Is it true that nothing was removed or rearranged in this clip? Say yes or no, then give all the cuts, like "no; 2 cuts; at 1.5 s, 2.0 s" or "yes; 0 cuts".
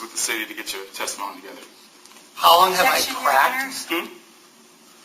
yes; 0 cuts